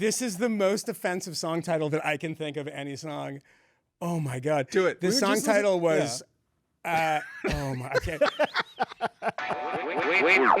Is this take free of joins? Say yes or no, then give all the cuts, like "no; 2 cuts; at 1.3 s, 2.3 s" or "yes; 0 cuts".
no; 1 cut; at 9.4 s